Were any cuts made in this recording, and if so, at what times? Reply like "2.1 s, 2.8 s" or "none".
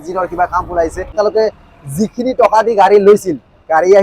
1.1 s